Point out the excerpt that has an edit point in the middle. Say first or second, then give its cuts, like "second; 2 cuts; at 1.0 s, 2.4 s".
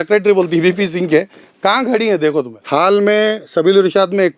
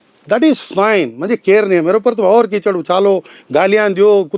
first; 1 cut; at 2.6 s